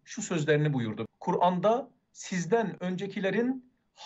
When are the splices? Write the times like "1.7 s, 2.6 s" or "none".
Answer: 1.0 s